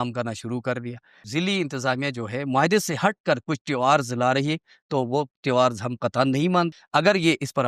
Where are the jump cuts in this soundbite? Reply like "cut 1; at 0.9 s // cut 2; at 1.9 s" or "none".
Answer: cut 1; at 1.1 s // cut 2; at 6.7 s